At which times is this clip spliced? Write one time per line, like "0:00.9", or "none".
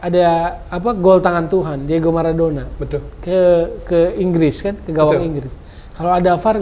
none